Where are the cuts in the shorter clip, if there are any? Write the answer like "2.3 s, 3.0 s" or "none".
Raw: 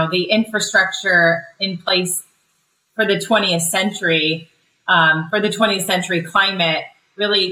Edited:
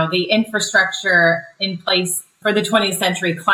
2.4 s

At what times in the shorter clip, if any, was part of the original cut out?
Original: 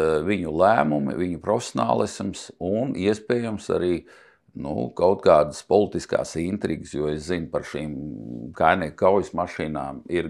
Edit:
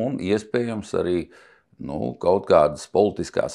none

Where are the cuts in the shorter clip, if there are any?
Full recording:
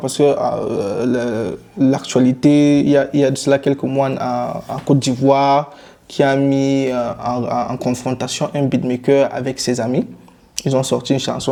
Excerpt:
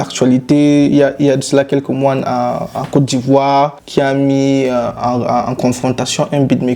3.8 s

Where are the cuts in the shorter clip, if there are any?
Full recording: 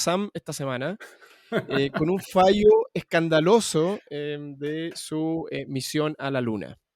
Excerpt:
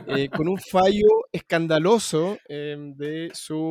none

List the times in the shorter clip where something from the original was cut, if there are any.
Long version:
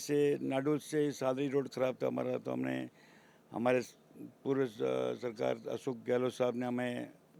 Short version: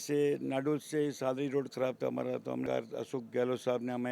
2.6 s

